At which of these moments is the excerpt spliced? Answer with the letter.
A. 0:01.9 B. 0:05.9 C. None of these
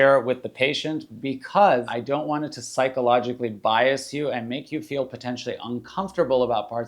A